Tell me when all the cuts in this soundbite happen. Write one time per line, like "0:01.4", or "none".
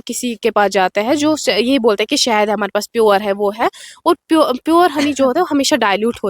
none